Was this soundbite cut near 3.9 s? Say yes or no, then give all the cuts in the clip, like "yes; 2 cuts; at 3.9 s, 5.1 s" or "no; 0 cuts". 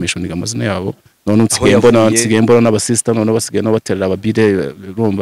no; 1 cut; at 1.1 s